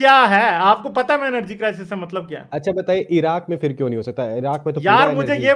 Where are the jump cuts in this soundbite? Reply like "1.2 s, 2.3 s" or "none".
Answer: none